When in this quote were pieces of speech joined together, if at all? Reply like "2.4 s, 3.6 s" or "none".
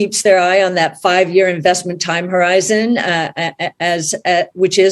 none